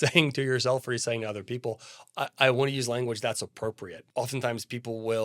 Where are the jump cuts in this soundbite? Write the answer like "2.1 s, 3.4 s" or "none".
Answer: 3.9 s

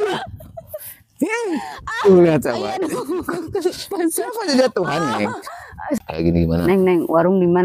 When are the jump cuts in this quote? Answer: 6.0 s

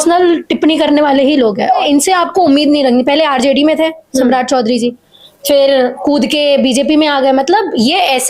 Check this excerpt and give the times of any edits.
1.8 s

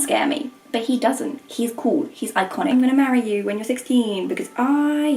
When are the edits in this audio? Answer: 2.7 s

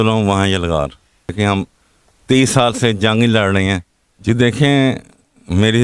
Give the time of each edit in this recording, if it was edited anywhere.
1.3 s, 4.2 s

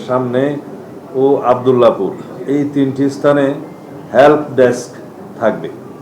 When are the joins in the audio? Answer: none

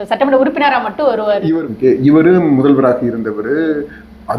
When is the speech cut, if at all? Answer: 1.5 s

